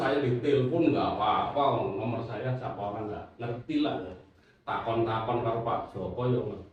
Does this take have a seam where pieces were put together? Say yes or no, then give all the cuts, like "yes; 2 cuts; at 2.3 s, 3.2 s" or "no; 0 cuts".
no; 0 cuts